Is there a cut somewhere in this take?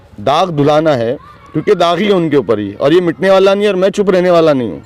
no; 0 cuts

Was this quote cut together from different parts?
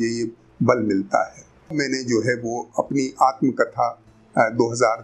yes; 1 cut; at 1.7 s

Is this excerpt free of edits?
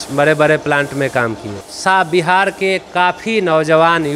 yes; 0 cuts

